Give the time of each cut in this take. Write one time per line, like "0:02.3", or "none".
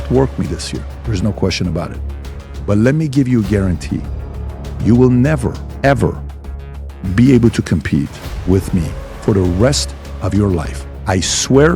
0:05.7
0:08.2